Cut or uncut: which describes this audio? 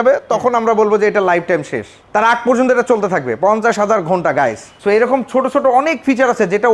uncut